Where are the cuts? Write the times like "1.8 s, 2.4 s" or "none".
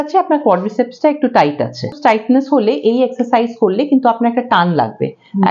1.9 s